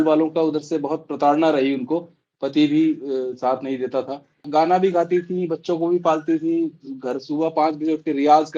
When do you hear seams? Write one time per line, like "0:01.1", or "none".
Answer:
0:04.5